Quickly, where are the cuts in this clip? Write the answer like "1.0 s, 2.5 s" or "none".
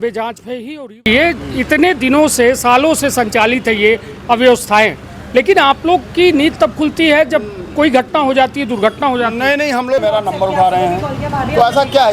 1.0 s, 10.0 s